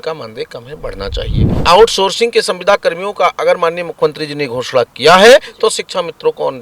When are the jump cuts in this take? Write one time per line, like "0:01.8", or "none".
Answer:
0:01.6